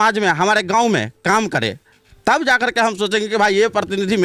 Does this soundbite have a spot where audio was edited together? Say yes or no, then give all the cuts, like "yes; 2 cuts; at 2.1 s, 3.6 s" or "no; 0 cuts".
no; 0 cuts